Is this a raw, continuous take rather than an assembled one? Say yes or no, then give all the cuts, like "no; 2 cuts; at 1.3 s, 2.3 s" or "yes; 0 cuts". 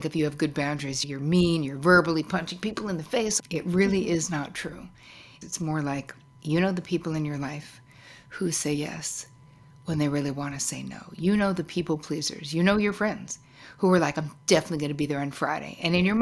no; 3 cuts; at 1.0 s, 3.3 s, 5.3 s